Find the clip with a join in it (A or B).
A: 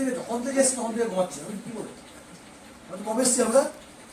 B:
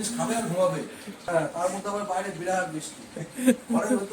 B